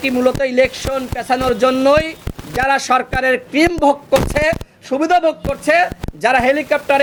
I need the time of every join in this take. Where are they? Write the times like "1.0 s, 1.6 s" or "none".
none